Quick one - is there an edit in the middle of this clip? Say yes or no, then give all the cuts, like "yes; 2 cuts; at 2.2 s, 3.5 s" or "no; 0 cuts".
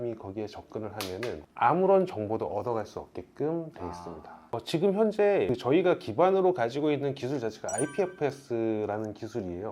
yes; 1 cut; at 4.4 s